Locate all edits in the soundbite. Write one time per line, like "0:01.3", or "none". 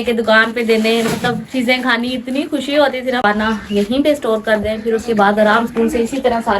0:03.2